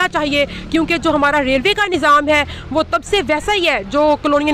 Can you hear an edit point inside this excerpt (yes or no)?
no